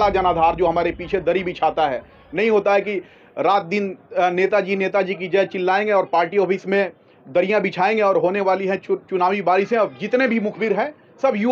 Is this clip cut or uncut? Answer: uncut